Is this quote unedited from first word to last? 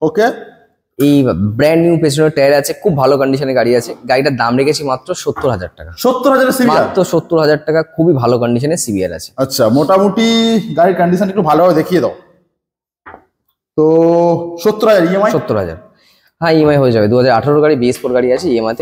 yes; 0 cuts

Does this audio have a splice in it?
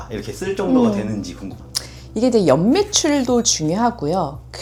no; 0 cuts

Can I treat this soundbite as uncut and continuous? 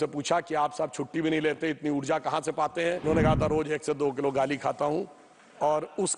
no; 1 cut; at 3.0 s

